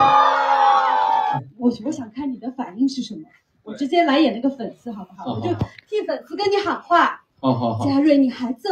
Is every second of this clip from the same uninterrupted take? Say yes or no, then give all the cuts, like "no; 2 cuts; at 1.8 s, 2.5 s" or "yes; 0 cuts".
no; 1 cut; at 1.4 s